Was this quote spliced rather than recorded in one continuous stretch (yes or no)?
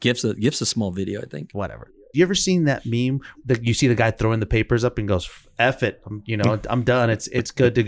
yes